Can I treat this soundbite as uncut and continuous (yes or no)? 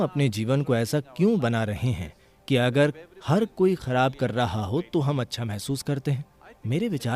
yes